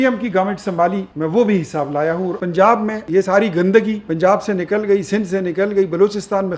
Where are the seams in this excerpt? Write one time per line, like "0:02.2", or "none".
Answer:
0:01.1
0:02.4
0:03.1
0:04.0